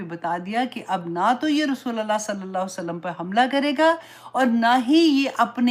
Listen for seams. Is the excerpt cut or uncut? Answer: uncut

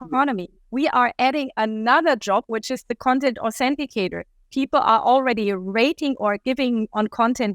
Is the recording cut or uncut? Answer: uncut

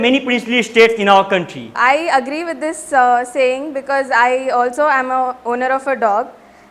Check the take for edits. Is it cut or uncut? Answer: cut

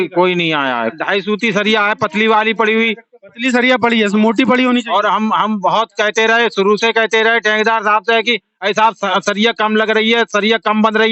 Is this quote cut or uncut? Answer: cut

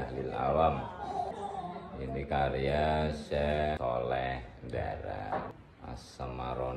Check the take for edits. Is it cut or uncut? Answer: cut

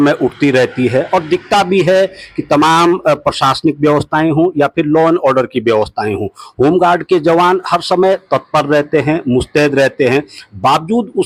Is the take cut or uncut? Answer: uncut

